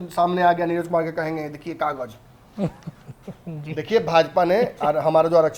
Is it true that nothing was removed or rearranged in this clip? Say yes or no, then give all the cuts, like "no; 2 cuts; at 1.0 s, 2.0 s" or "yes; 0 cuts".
yes; 0 cuts